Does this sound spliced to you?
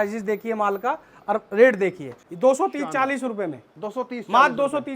yes; 1 cut; at 2.1 s

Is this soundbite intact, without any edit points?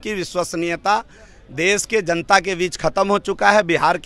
yes; 0 cuts

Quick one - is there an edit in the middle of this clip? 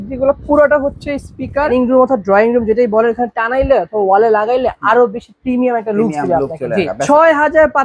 yes; 2 cuts; at 1.7 s, 6.9 s

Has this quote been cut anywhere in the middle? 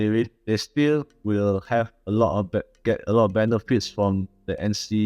no; 0 cuts

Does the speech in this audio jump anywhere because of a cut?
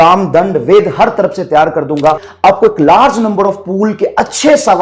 yes; 1 cut; at 2.3 s

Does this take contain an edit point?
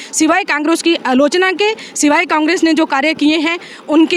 no; 0 cuts

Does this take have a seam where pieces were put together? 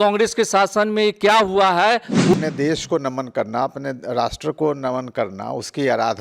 yes; 1 cut; at 2.3 s

